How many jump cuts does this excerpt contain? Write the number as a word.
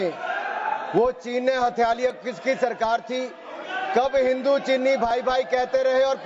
zero